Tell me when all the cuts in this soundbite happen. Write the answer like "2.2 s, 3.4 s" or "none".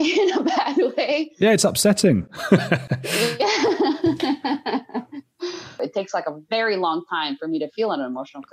5.8 s